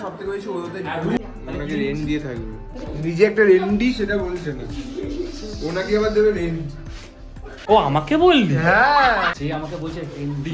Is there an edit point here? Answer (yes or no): yes